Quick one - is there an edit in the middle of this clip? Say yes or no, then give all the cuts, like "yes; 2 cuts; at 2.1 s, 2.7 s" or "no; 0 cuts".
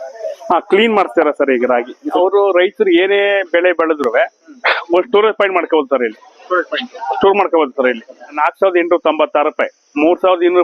yes; 2 cuts; at 2.1 s, 8.3 s